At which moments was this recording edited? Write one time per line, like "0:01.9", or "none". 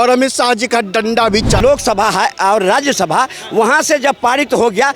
0:01.6